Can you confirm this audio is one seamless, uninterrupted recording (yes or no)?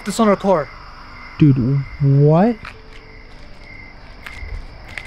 yes